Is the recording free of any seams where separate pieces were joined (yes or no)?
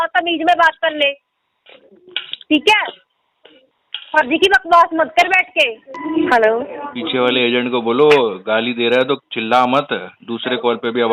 no